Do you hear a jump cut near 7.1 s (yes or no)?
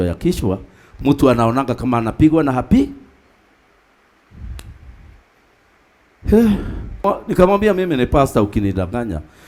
yes